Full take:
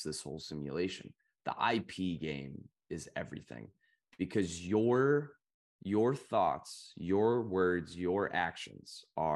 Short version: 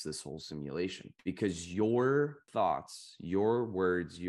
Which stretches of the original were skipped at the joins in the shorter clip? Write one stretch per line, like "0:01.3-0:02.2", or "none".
0:01.1-0:04.0
0:05.4-0:06.2

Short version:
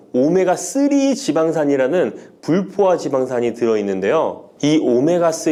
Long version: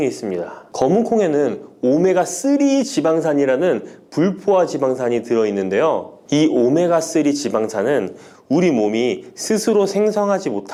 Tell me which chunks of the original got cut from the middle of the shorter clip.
none

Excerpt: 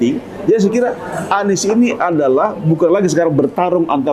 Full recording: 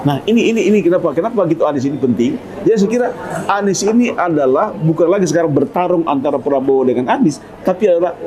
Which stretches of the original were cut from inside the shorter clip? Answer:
none

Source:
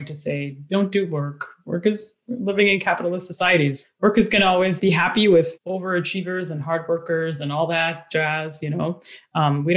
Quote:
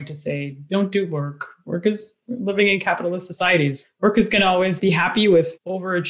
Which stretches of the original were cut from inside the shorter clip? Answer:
none

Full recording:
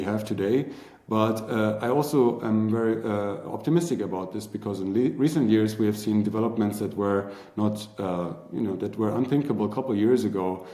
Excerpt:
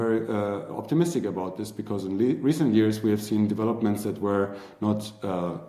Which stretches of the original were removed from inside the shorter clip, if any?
none

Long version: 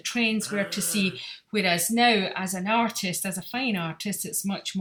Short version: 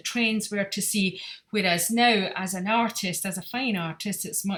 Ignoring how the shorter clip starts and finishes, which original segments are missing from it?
none

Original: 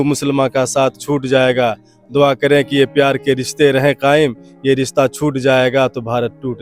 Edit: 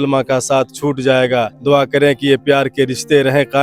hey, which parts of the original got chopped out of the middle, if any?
0:01.8-0:02.0

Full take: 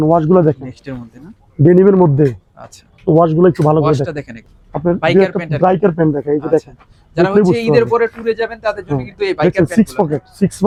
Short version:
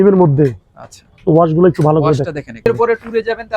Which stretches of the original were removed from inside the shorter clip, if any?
0:04.5-0:07.8

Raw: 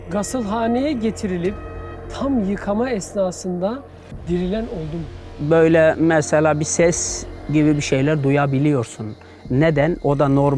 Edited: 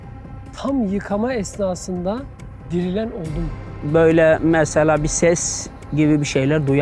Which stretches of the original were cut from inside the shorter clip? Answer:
none

